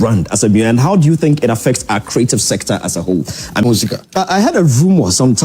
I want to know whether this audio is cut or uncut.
cut